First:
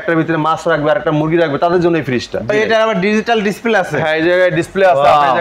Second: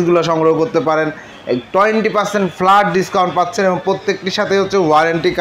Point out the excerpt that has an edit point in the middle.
first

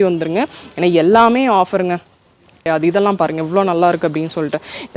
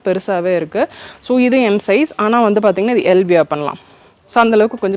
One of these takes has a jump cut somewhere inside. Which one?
first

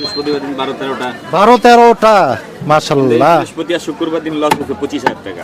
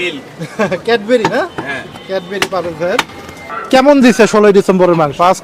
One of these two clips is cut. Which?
second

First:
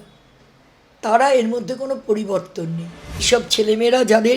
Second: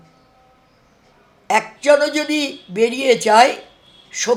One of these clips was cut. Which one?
first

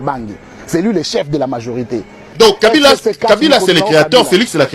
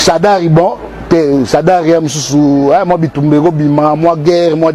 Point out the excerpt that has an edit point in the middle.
first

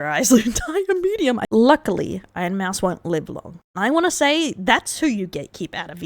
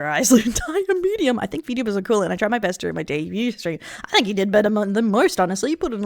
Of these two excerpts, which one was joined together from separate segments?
first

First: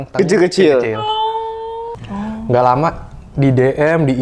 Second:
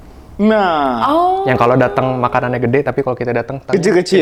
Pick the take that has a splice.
first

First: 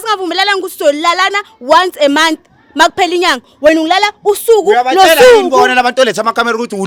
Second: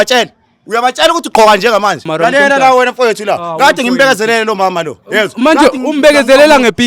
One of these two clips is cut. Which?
second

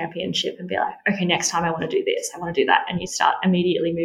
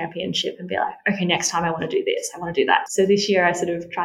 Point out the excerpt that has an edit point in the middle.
second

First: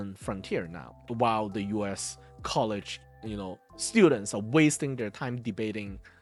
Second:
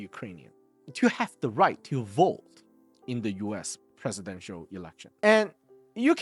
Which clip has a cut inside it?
second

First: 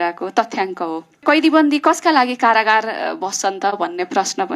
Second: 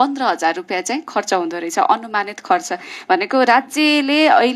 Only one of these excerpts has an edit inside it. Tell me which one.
first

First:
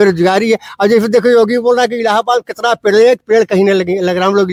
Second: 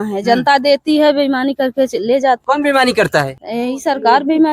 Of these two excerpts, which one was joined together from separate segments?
second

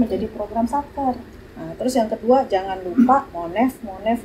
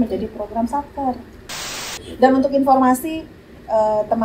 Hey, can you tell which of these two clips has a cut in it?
second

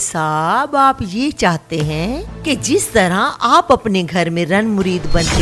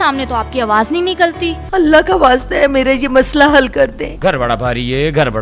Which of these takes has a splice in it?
second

